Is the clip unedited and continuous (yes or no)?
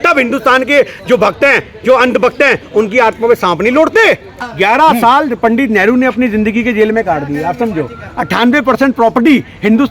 no